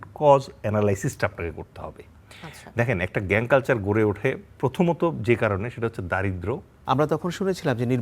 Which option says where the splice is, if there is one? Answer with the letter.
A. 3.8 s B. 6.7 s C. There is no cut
B